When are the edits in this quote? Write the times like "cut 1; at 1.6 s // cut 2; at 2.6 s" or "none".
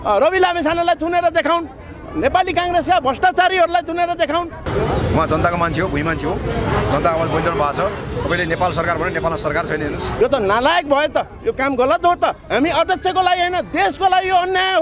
cut 1; at 4.7 s // cut 2; at 10.1 s // cut 3; at 12.4 s